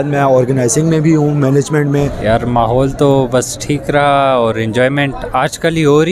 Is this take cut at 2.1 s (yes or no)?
yes